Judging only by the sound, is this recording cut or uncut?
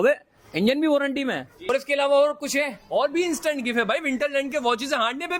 cut